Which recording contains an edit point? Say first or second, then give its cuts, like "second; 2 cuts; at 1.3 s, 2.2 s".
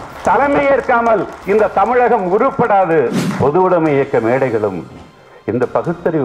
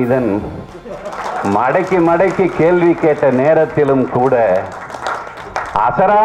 first; 1 cut; at 3.2 s